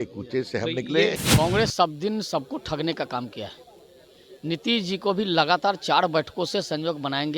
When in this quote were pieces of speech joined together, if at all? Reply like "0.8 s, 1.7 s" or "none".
1.2 s

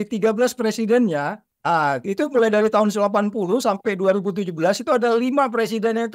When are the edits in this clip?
1.5 s

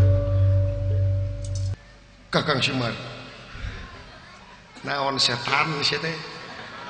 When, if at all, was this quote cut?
1.7 s

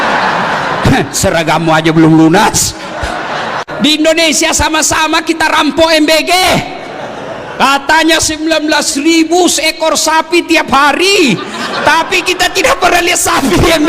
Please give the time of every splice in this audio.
3.6 s

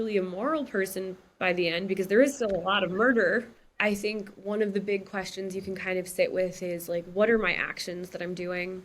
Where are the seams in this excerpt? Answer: 3.6 s

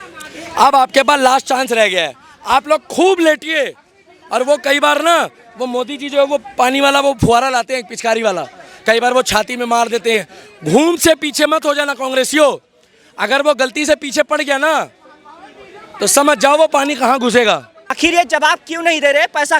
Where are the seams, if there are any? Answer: 17.9 s

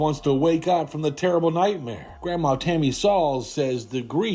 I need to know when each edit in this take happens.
none

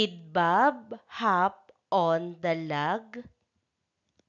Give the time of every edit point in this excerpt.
2.6 s

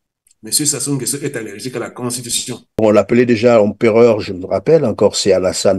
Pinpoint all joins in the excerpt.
2.7 s

